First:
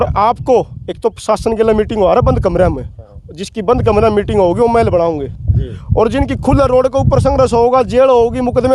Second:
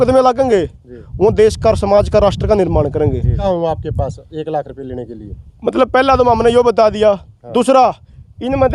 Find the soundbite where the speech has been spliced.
second; 1 cut; at 3.3 s

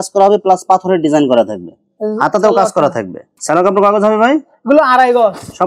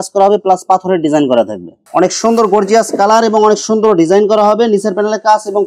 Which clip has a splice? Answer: second; 1 cut; at 1.8 s

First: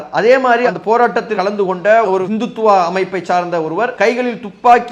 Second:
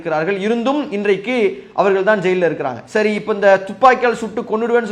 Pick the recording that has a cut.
first; 2 cuts; at 1.3 s, 3.9 s

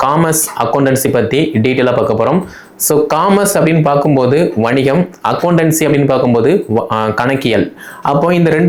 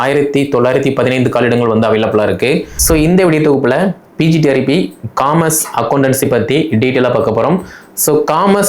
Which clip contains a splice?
second; 1 cut; at 2.7 s

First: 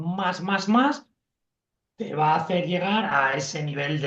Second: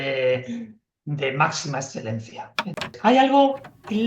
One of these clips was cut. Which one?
second; 1 cut; at 2.9 s

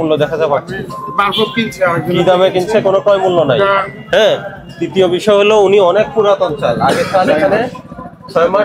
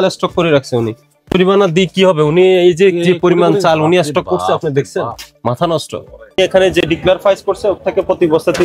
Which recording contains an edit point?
second; 2 cuts; at 1.1 s, 6.4 s

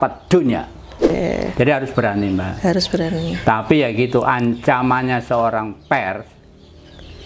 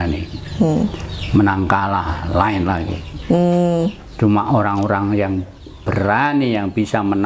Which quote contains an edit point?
first; 1 cut; at 1.1 s

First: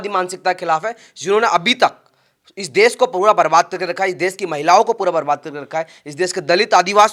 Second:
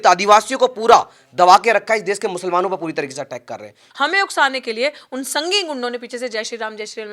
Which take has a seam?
second; 1 cut; at 3.8 s

